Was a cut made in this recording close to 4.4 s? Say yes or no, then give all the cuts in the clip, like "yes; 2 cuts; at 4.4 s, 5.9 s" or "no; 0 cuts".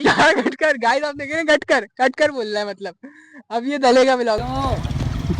yes; 1 cut; at 4.4 s